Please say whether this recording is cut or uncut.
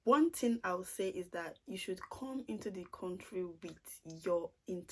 uncut